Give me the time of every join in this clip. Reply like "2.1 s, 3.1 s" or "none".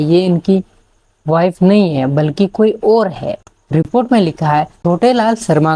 3.9 s, 4.7 s